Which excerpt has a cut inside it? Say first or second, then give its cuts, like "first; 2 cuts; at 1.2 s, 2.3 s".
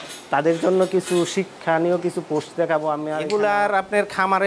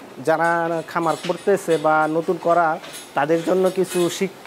first; 1 cut; at 3.2 s